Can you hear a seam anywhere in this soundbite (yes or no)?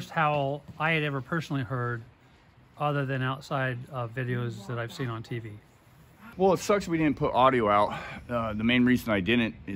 yes